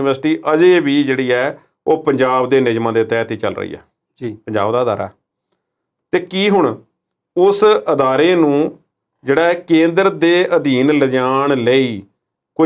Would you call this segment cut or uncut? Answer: uncut